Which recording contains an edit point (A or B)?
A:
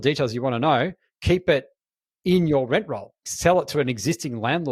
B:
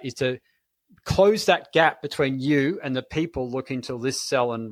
A